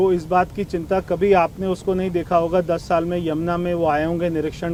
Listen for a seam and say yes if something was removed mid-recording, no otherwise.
no